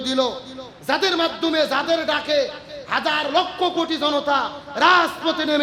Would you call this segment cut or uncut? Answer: uncut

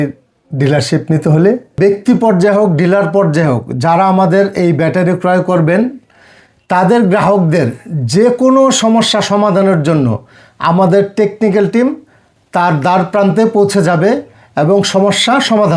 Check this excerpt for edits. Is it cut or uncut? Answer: cut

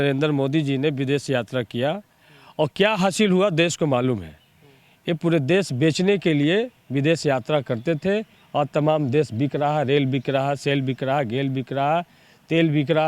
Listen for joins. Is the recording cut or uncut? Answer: uncut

